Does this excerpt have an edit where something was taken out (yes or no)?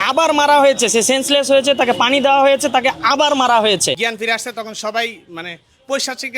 yes